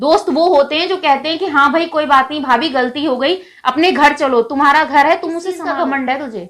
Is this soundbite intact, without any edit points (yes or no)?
no